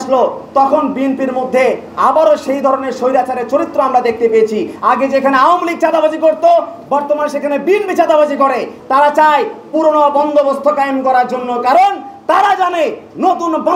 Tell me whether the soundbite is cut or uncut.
cut